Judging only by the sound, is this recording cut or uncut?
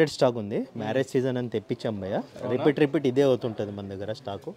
uncut